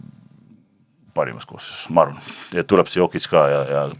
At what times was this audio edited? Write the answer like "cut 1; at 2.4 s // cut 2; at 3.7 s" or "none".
none